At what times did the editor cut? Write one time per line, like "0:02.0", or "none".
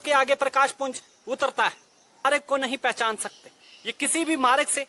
0:02.3